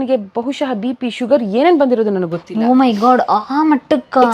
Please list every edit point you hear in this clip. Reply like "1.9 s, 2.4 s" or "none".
none